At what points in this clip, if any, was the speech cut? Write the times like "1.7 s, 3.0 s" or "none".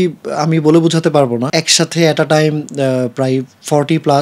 1.5 s